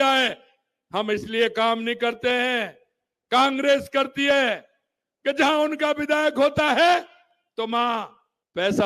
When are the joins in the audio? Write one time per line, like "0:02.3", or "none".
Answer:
none

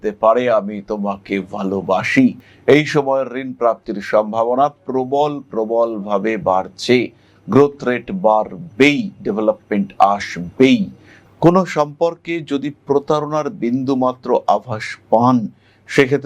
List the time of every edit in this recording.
0:02.4
0:11.2

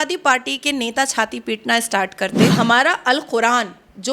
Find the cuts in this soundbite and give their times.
0:02.5

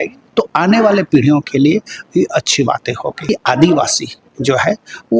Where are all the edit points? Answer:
0:03.2

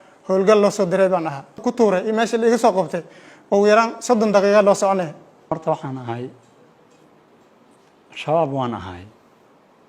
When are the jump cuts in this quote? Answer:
0:01.6
0:05.5

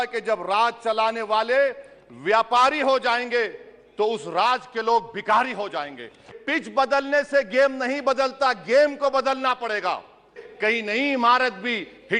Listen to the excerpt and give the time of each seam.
0:06.4
0:10.4

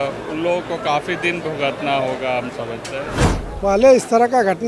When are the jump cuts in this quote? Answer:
0:03.2

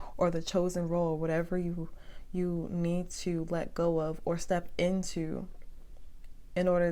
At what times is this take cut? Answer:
none

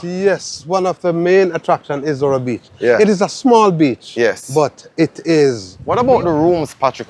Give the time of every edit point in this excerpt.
0:05.7

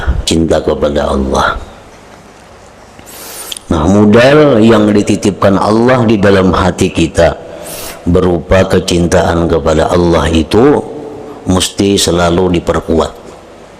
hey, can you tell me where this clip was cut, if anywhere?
0:02.5

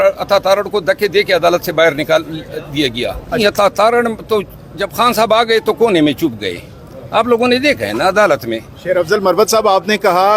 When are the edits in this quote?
0:03.4
0:08.7

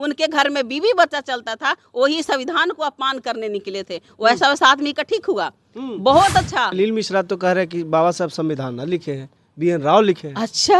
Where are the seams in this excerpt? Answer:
0:06.7

